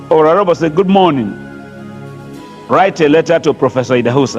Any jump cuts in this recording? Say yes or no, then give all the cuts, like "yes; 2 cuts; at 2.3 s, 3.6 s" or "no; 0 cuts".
no; 0 cuts